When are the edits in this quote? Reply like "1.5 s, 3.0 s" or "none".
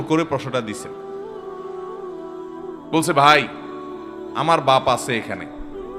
1.1 s, 2.9 s